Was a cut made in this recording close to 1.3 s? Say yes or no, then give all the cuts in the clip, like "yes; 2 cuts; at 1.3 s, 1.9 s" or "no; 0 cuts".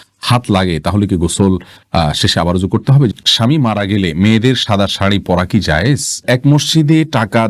no; 2 cuts; at 3.1 s, 6.2 s